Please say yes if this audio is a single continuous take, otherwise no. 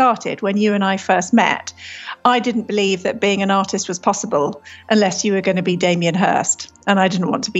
yes